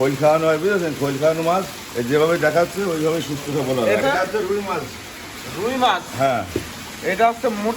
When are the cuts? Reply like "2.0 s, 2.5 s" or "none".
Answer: 4.0 s